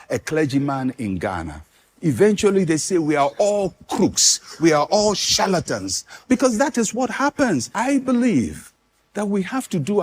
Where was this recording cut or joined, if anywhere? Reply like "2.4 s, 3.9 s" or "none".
7.7 s